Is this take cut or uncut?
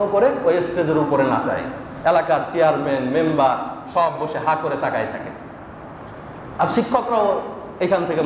uncut